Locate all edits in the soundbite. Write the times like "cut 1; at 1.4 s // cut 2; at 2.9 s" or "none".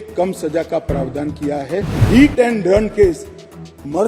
cut 1; at 2.0 s